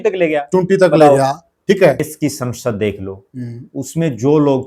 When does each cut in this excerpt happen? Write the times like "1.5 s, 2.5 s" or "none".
2.1 s